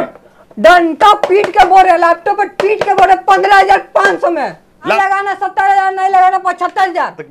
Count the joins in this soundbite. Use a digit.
1